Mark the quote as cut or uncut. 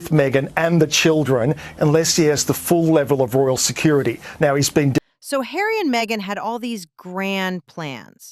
uncut